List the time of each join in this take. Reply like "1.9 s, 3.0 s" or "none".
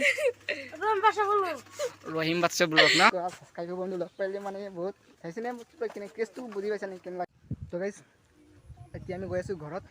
3.1 s, 5.1 s, 7.4 s